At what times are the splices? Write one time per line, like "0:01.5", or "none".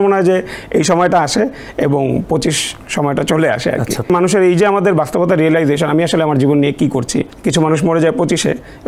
0:04.1
0:07.4